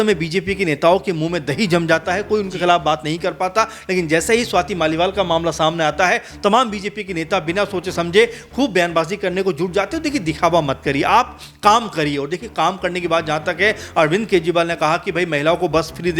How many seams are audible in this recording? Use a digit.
0